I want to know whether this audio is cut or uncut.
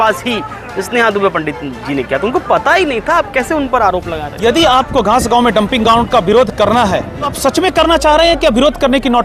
cut